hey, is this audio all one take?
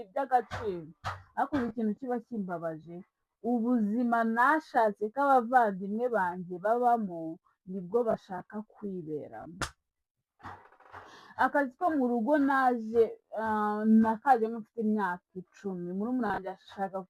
yes; 0 cuts

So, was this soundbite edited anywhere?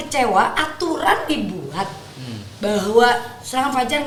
no; 0 cuts

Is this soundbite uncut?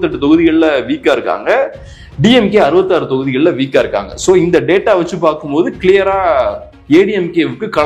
yes; 0 cuts

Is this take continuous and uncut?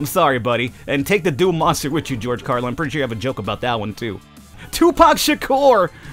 no; 1 cut; at 4.6 s

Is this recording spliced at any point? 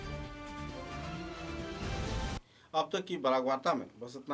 no; 0 cuts

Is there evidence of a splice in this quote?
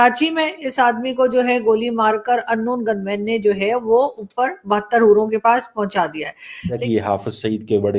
yes; 1 cut; at 6.8 s

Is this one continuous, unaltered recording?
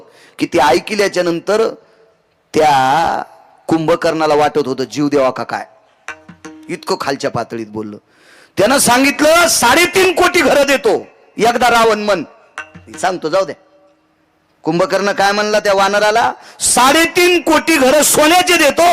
yes; 0 cuts

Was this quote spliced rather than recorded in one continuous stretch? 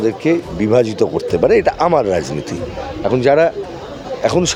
no; 0 cuts

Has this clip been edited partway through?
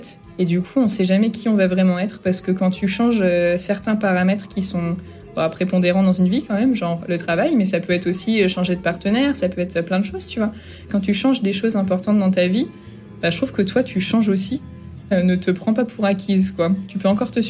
yes; 2 cuts; at 10.8 s, 15.1 s

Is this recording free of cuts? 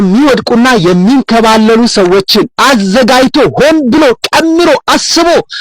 yes; 0 cuts

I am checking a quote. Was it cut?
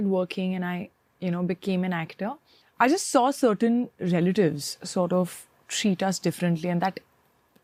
no; 0 cuts

